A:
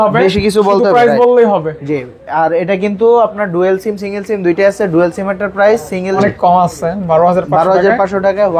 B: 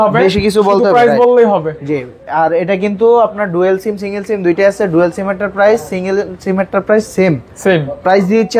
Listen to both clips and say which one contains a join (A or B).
A